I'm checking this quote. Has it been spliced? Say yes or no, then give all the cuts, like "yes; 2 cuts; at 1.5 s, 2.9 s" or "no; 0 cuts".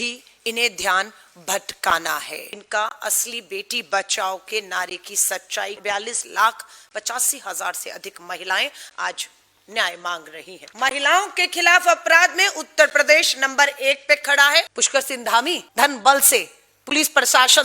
yes; 4 cuts; at 2.5 s, 10.6 s, 14.8 s, 15.6 s